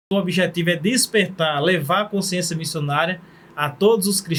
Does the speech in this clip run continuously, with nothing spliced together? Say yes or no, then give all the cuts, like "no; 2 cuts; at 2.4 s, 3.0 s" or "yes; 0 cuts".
yes; 0 cuts